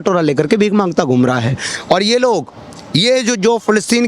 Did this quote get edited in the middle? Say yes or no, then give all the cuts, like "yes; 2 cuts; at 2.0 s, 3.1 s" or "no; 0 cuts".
no; 0 cuts